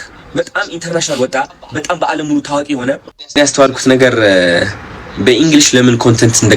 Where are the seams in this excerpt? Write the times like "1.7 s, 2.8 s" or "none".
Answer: 3.2 s